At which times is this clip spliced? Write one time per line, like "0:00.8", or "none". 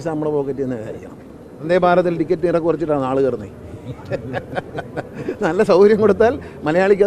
0:01.5